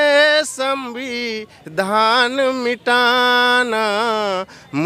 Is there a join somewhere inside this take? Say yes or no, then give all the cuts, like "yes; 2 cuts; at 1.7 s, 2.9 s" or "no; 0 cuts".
no; 0 cuts